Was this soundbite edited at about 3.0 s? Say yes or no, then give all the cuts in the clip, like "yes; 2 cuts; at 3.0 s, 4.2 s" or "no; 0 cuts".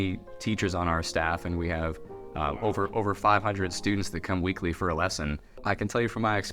no; 1 cut; at 5.6 s